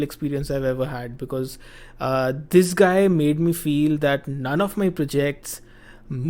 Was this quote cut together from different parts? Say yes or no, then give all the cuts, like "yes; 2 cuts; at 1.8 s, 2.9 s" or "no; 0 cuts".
no; 0 cuts